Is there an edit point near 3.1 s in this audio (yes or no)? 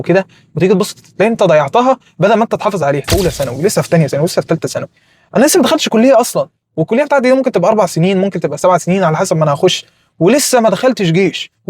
yes